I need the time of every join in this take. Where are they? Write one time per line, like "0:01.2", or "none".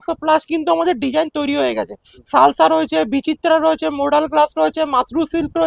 none